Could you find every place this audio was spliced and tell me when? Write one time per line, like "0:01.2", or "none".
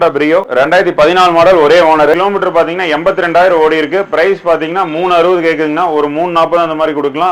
0:02.2